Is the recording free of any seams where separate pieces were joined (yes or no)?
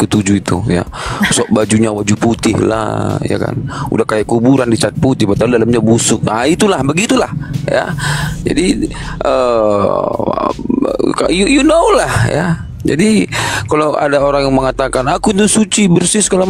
yes